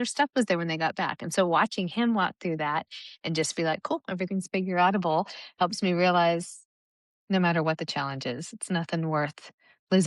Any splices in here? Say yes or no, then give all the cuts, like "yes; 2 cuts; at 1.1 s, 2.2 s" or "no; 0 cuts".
no; 0 cuts